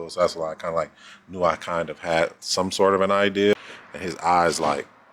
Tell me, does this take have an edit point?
yes; 1 cut; at 3.5 s

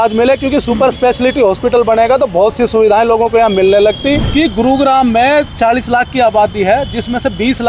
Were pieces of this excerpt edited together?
yes; 1 cut; at 4.2 s

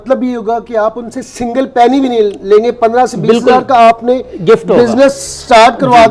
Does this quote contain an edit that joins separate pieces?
no; 0 cuts

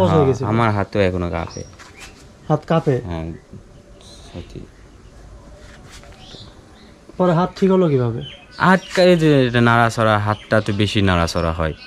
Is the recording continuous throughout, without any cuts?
yes; 0 cuts

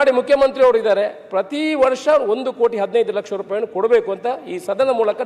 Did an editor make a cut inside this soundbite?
no; 0 cuts

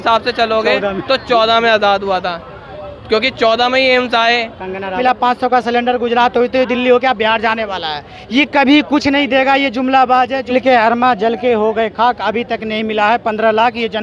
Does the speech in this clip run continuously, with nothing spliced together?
no; 2 cuts; at 5.0 s, 10.4 s

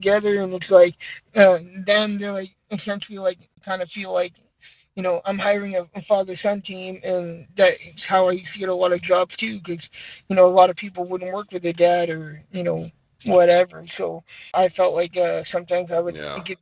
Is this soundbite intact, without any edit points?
no; 2 cuts; at 3.6 s, 14.5 s

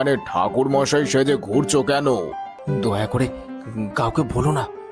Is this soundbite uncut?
no; 1 cut; at 2.5 s

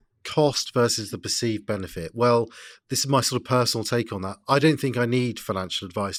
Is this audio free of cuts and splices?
yes; 0 cuts

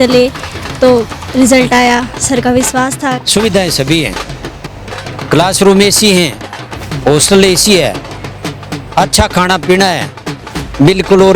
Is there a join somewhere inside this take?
yes; 1 cut; at 3.2 s

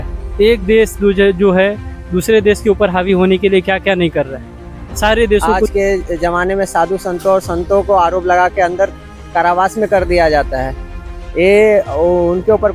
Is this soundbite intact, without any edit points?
no; 1 cut; at 5.7 s

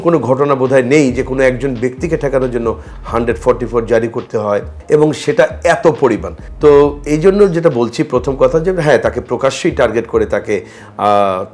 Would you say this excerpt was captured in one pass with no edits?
yes; 0 cuts

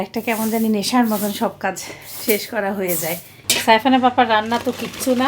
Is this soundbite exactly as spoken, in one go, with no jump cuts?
no; 1 cut; at 3.3 s

